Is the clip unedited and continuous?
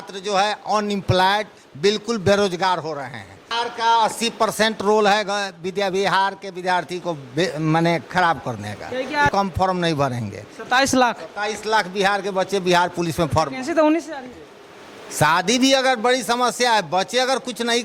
no; 3 cuts; at 3.5 s, 9.3 s, 14.2 s

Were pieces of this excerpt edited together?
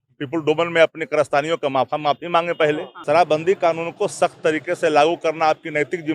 yes; 1 cut; at 2.9 s

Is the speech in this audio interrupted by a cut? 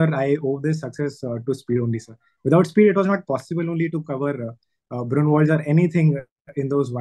no; 0 cuts

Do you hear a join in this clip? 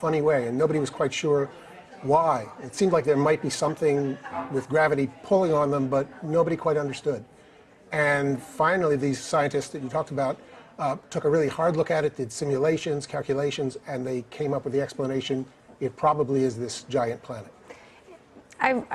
no; 0 cuts

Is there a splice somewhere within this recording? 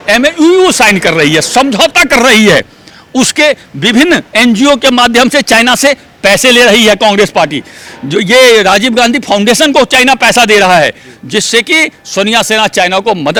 no; 0 cuts

